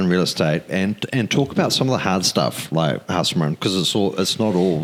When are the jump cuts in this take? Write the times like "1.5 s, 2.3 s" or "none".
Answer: none